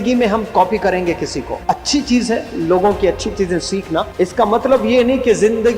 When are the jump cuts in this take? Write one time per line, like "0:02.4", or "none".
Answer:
0:01.5
0:04.1

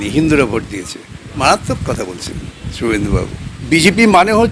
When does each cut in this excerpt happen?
0:01.4
0:03.5

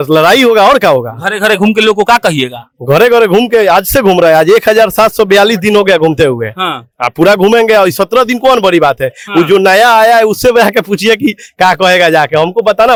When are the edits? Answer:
none

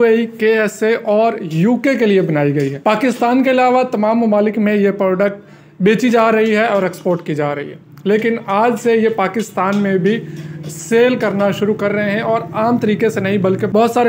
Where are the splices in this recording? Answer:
none

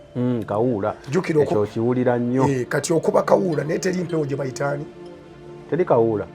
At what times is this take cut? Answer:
none

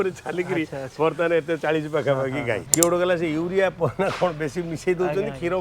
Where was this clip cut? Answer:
0:02.7

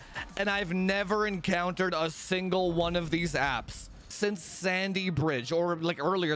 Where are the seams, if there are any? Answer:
0:04.1

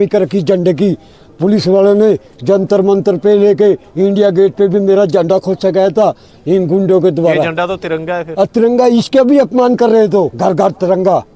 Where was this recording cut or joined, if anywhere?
0:10.3

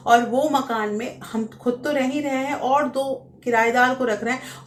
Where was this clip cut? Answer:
none

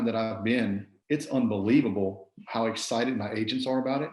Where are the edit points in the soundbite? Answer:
0:00.9

